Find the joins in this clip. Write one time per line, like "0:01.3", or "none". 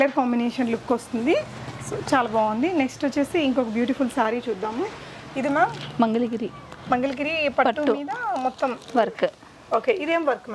none